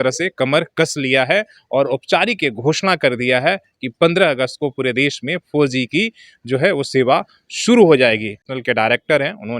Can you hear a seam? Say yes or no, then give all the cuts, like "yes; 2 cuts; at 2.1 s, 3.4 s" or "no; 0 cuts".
yes; 1 cut; at 8.5 s